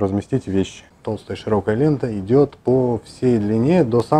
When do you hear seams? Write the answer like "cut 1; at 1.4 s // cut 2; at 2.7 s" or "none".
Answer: cut 1; at 0.9 s